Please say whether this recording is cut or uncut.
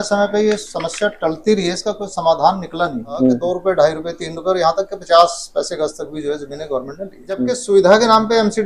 cut